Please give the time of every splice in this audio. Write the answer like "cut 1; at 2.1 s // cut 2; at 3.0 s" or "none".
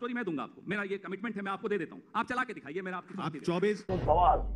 none